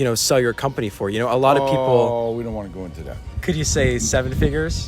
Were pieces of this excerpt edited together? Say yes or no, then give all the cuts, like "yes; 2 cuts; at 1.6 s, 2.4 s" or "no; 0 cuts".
yes; 1 cut; at 3.4 s